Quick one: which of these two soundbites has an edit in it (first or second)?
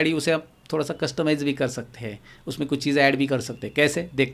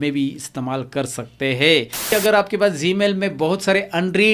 second